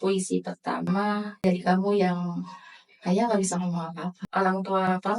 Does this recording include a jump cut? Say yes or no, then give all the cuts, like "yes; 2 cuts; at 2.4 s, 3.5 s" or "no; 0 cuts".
yes; 2 cuts; at 1.4 s, 4.1 s